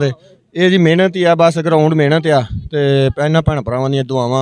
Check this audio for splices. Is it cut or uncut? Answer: uncut